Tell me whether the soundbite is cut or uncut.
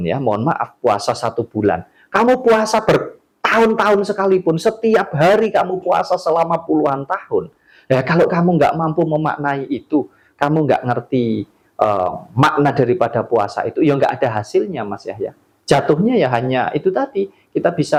uncut